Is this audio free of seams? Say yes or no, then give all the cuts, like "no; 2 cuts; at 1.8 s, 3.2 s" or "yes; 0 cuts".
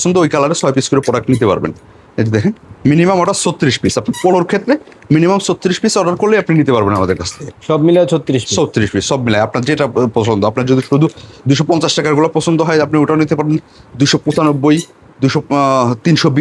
yes; 0 cuts